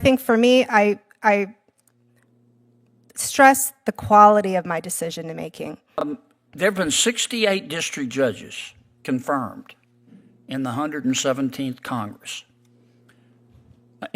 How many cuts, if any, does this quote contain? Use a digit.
1